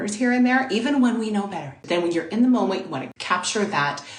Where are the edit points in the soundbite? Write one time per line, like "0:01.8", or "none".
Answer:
0:01.7
0:03.1